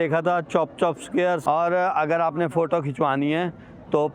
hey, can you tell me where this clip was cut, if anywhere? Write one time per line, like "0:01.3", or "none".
0:01.4

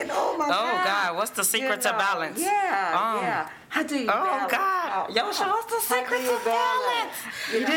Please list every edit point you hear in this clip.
none

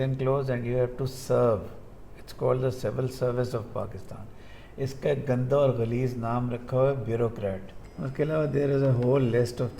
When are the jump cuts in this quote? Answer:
0:07.8

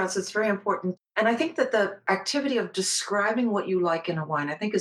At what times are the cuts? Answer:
0:01.0

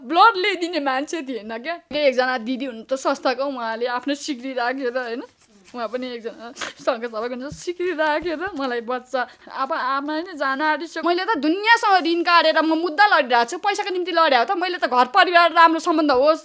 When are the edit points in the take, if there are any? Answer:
0:01.9
0:11.0

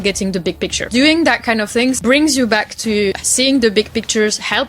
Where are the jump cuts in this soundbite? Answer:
0:00.8
0:02.0
0:03.2

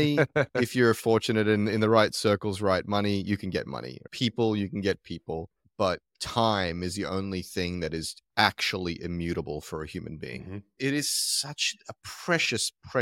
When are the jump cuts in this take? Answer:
0:10.7

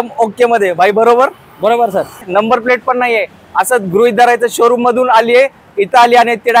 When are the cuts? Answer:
0:02.2

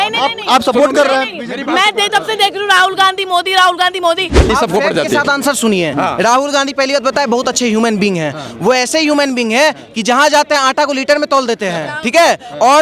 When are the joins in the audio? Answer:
0:04.4

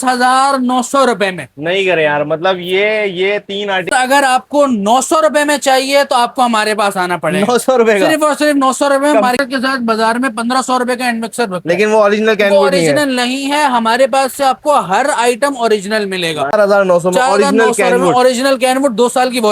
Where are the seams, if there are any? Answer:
0:03.9
0:09.4
0:16.5

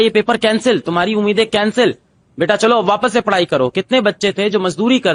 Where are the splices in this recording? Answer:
none

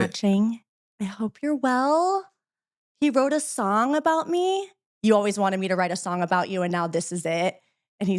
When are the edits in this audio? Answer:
0:04.8

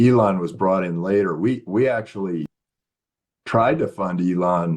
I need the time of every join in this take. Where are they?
0:02.5

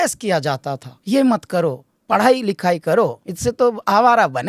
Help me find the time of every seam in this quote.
0:00.9
0:03.3

